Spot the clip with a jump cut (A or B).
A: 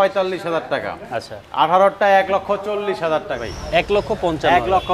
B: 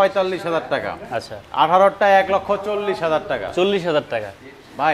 A